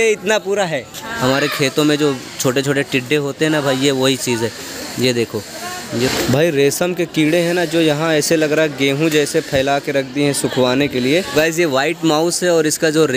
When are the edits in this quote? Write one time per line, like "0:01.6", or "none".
0:01.1
0:06.1
0:11.3